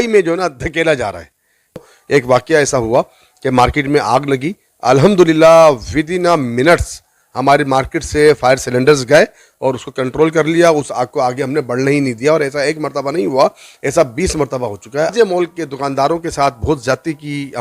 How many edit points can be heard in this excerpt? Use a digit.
2